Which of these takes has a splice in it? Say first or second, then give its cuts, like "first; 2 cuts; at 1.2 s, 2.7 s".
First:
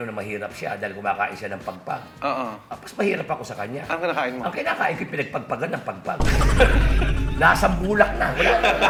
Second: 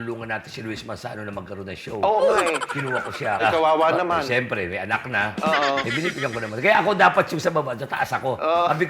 second; 1 cut; at 3.4 s